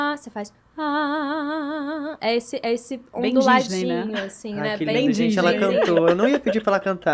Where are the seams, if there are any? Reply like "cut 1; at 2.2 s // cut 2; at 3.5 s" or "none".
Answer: none

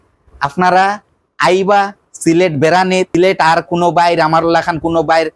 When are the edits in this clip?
cut 1; at 3.2 s

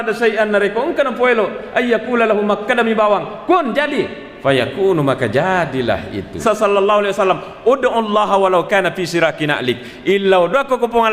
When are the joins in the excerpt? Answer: cut 1; at 6.3 s

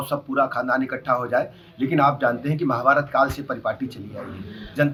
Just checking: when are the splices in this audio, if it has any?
none

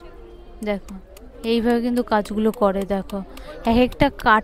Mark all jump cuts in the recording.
none

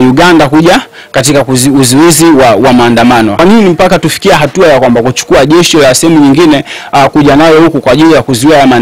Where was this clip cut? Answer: cut 1; at 3.4 s

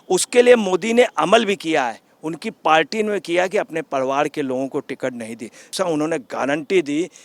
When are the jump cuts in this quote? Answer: cut 1; at 5.7 s

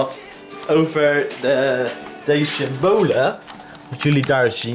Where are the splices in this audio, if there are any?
none

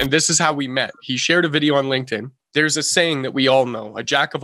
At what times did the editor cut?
cut 1; at 2.4 s

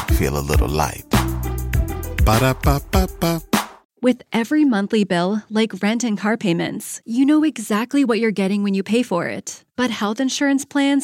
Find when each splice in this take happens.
cut 1; at 3.8 s

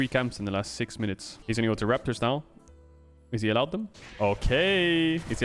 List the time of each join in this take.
cut 1; at 1.4 s

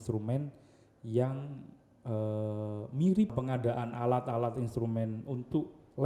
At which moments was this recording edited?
cut 1; at 3.3 s

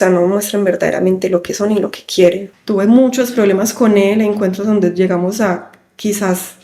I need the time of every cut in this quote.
cut 1; at 2.5 s

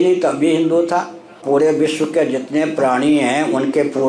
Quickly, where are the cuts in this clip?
cut 1; at 1.4 s

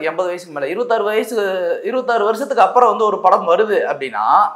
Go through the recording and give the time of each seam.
none

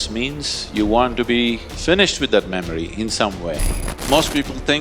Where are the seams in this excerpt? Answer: cut 1; at 1.7 s // cut 2; at 3.9 s

